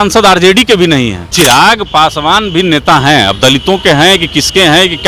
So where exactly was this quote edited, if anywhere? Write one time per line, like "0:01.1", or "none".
0:01.3